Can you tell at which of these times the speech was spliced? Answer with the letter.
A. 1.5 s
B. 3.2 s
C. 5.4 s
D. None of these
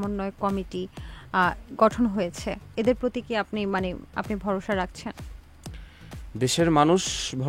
D